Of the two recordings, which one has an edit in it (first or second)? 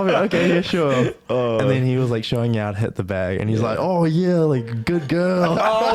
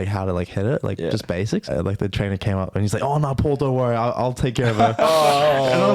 second